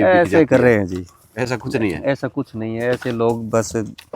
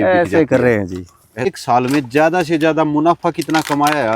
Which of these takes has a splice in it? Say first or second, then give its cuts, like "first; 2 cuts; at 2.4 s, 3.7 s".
second; 1 cut; at 1.5 s